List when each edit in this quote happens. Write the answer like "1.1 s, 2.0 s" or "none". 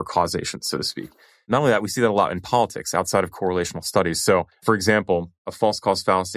none